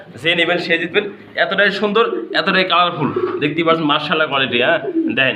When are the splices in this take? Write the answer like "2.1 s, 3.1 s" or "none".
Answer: none